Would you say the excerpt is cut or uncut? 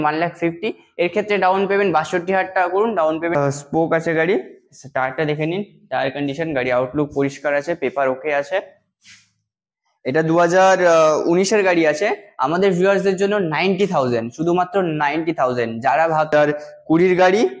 cut